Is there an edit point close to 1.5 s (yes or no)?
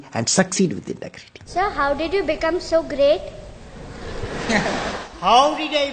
yes